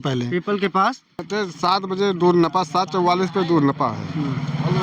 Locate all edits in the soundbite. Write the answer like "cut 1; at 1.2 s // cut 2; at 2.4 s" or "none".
cut 1; at 1.3 s